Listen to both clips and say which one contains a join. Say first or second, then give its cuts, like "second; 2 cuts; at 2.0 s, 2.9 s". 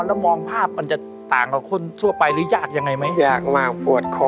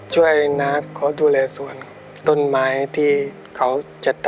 second; 3 cuts; at 0.8 s, 2.0 s, 3.4 s